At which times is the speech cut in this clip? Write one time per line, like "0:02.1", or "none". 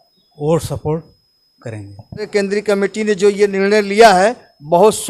0:02.3